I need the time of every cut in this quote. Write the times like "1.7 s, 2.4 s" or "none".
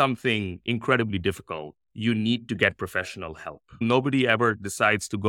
3.8 s